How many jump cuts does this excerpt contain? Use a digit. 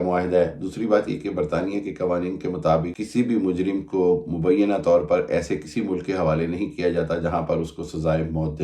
1